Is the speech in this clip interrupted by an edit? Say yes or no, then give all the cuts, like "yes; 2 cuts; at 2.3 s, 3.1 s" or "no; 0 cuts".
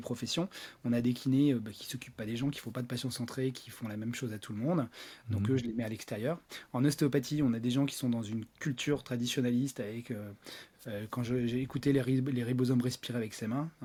no; 0 cuts